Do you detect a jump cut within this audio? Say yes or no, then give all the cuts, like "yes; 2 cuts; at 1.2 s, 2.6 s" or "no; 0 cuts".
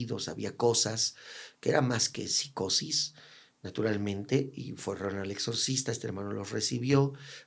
no; 0 cuts